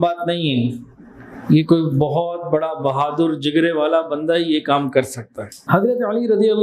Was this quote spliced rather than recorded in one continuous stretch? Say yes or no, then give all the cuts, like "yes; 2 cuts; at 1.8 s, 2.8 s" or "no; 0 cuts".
yes; 1 cut; at 5.5 s